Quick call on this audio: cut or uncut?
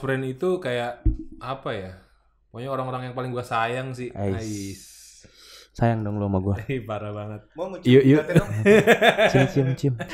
uncut